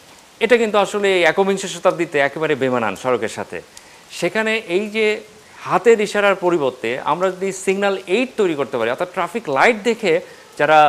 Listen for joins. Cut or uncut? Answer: uncut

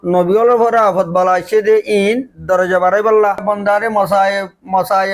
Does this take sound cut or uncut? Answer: cut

